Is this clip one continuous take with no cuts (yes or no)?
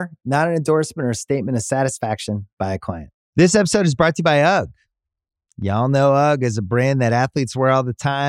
no